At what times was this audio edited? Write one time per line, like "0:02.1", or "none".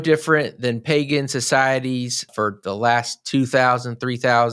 0:02.3

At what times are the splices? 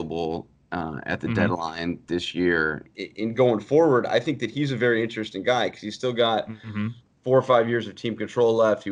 0:02.8

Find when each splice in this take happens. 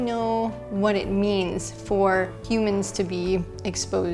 0:02.4

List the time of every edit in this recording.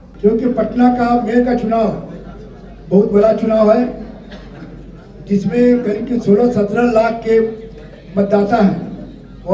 none

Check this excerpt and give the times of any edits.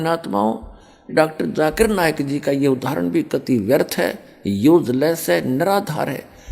0:01.1

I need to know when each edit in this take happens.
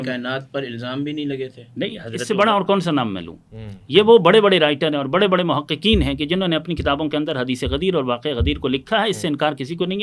0:02.1

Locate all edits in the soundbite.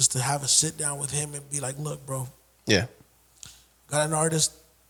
none

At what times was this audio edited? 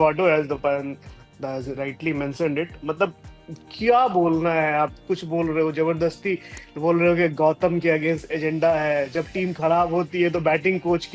none

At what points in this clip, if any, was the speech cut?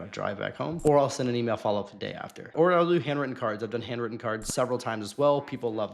0:00.8
0:02.5

